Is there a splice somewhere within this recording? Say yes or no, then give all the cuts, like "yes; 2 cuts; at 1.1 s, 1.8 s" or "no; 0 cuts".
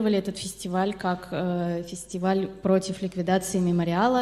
no; 0 cuts